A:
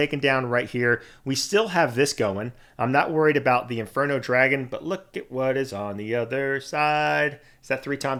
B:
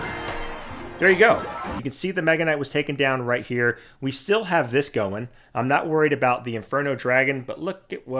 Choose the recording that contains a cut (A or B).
B